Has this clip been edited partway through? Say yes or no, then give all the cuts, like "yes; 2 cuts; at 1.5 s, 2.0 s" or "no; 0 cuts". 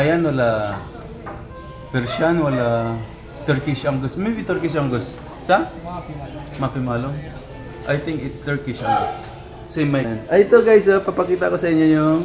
yes; 1 cut; at 10.1 s